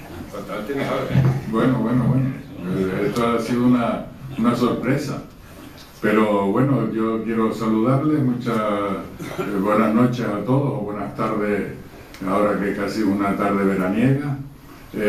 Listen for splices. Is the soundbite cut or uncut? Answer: cut